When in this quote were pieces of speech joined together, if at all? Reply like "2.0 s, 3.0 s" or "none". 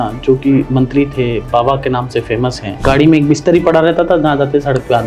2.7 s